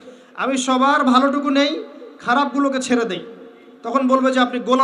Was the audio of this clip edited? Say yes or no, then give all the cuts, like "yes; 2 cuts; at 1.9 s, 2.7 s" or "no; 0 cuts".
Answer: no; 0 cuts